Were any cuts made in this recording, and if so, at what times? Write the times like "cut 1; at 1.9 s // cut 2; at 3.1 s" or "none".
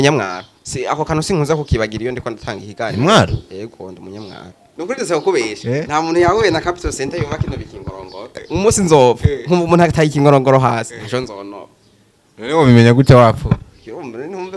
cut 1; at 4.8 s // cut 2; at 8.3 s